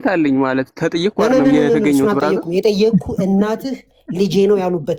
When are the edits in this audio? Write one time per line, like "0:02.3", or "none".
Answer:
none